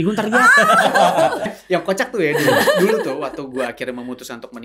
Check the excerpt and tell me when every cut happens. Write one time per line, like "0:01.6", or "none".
0:01.5